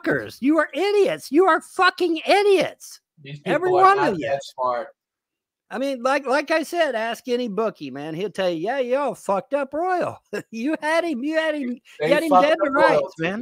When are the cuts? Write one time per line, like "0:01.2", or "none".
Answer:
none